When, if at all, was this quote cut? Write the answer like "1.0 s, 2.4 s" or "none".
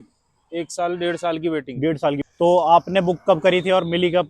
2.2 s